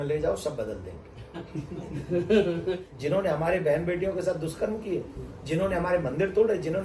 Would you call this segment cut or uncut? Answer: cut